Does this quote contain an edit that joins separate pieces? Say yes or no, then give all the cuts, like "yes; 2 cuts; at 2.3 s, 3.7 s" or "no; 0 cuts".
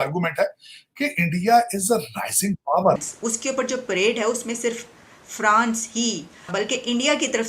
yes; 2 cuts; at 3.0 s, 6.5 s